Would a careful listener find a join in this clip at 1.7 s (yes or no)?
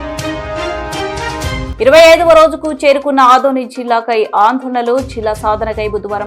yes